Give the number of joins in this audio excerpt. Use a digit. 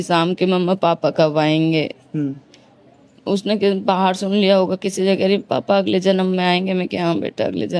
0